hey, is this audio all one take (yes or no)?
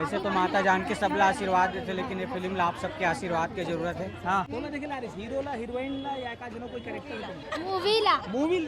no